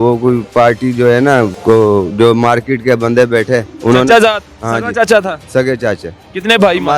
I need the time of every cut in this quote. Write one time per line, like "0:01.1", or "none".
0:01.6
0:03.7